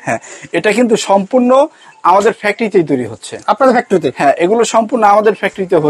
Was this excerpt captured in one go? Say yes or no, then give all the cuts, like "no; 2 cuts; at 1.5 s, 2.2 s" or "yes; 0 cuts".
yes; 0 cuts